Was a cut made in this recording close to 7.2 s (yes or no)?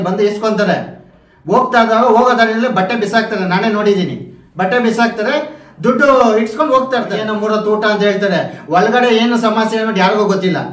yes